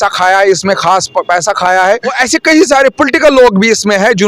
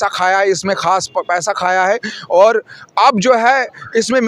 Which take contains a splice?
first; 1 cut; at 2.2 s

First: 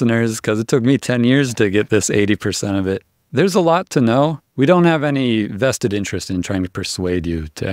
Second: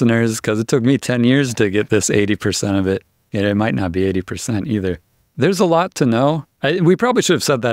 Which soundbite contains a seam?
first; 2 cuts; at 3.1 s, 4.5 s

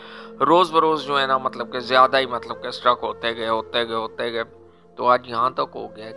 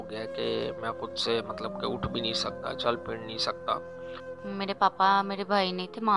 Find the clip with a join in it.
second; 1 cut; at 4.2 s

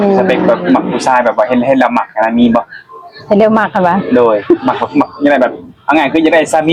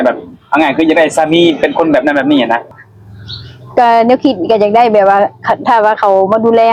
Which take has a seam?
second; 1 cut; at 2.7 s

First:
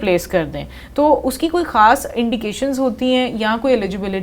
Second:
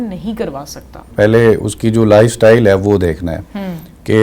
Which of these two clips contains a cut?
second; 1 cut; at 1.1 s

